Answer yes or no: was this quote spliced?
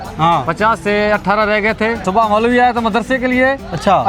yes